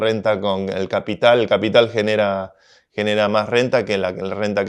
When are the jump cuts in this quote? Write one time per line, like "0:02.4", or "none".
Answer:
none

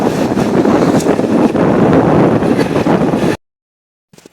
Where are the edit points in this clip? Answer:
0:03.3

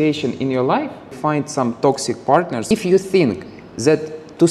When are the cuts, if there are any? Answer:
0:01.2
0:02.7

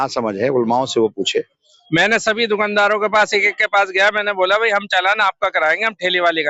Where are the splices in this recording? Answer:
0:01.7

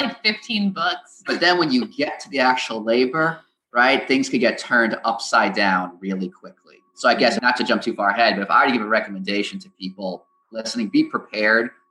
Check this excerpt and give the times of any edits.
0:07.4

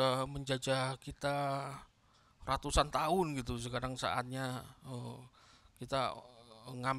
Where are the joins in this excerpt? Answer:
none

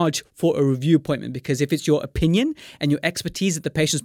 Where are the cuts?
none

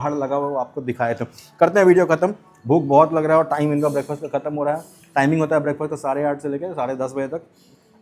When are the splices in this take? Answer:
none

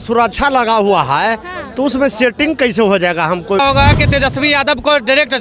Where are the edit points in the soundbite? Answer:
0:03.6

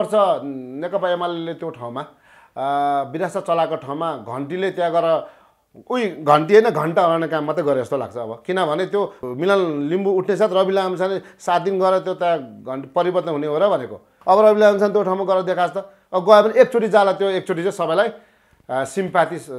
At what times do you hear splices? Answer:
0:09.2

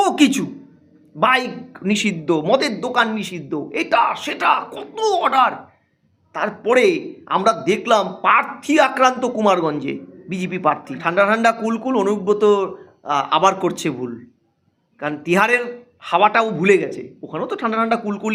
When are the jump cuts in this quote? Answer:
0:10.9

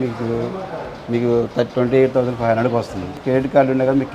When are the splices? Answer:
0:03.2

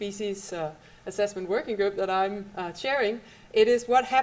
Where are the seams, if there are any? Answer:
0:01.7

